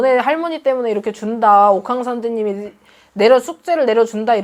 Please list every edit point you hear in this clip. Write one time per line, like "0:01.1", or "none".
none